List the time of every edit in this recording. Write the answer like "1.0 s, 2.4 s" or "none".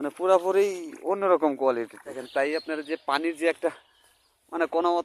2.2 s